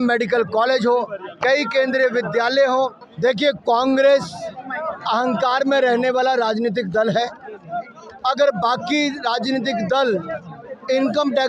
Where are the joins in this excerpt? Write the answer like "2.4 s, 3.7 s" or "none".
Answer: 3.0 s